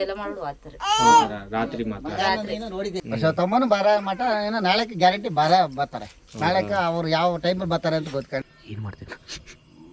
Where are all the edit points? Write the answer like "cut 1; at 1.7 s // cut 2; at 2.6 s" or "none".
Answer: cut 1; at 3.0 s // cut 2; at 8.4 s